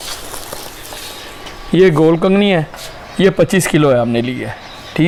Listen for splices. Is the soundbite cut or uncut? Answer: uncut